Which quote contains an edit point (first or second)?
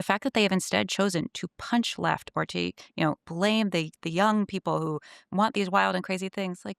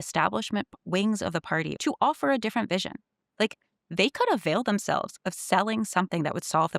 second